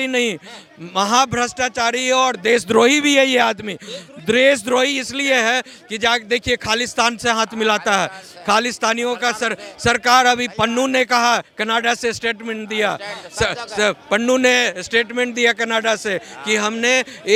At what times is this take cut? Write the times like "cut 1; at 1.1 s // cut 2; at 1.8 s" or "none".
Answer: none